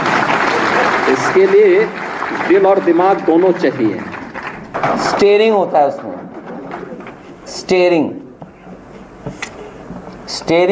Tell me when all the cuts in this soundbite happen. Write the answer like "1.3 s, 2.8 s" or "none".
4.7 s